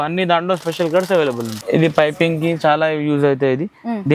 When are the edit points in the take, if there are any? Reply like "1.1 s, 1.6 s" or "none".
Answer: 1.5 s